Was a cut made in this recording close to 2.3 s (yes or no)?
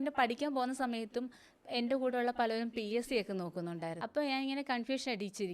no